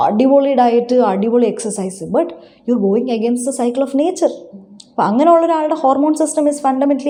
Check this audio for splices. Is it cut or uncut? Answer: uncut